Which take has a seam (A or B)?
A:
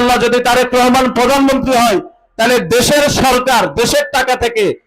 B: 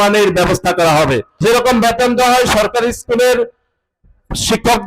B